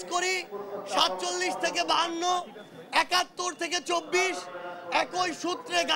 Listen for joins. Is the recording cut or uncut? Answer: uncut